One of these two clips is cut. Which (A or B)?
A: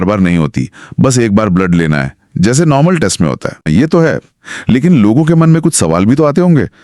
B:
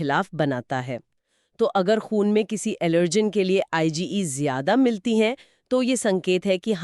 A